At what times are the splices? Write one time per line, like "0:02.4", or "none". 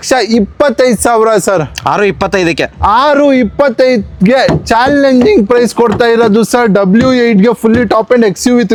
none